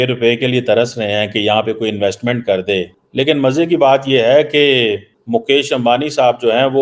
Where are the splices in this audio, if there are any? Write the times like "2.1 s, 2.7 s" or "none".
3.0 s, 5.1 s